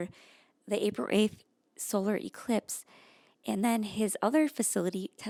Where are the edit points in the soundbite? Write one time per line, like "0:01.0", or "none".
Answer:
none